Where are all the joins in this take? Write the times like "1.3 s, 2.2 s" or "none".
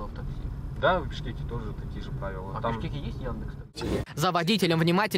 3.6 s